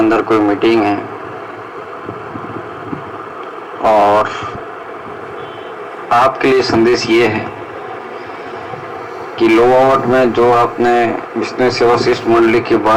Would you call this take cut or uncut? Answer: uncut